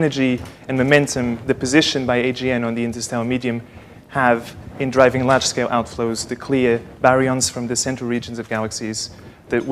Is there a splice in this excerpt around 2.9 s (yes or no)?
yes